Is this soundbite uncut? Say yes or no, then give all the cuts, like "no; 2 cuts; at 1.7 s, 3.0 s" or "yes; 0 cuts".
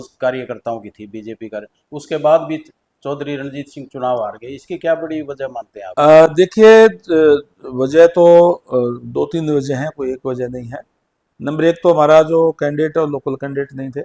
yes; 0 cuts